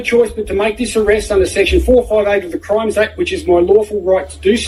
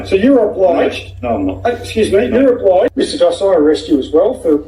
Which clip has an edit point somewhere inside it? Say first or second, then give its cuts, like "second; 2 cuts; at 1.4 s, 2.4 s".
second; 1 cut; at 2.9 s